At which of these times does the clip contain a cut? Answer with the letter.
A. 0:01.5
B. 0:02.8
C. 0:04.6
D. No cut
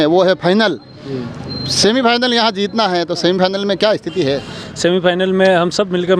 D